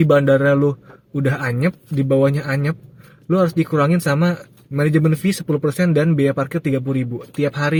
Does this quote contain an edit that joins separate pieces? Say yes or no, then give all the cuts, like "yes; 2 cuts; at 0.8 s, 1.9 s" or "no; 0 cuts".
no; 0 cuts